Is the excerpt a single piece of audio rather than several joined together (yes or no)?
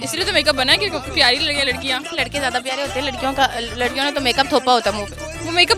no